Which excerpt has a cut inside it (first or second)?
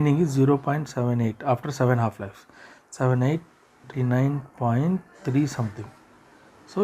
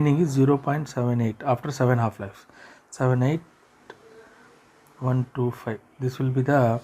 first